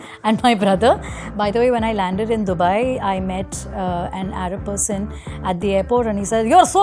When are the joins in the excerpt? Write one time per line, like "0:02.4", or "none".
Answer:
none